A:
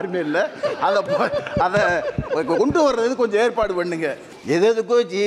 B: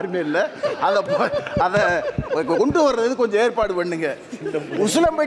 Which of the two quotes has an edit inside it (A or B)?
A